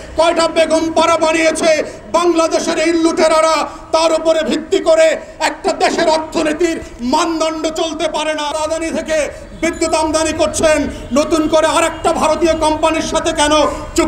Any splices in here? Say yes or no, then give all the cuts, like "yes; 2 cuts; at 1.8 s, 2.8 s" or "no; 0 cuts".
yes; 1 cut; at 8.5 s